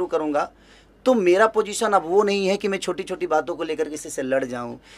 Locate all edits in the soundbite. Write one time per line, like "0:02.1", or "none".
none